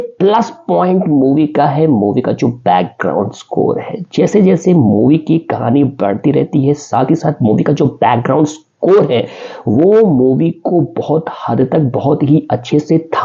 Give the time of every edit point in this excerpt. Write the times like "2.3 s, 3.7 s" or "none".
none